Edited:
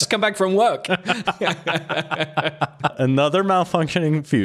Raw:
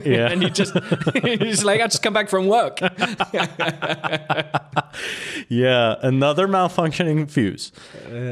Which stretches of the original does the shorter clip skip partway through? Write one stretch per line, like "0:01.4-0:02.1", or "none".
0:04.9-0:06.0